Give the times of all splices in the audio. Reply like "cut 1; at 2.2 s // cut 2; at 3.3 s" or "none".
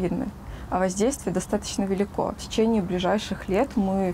cut 1; at 2.4 s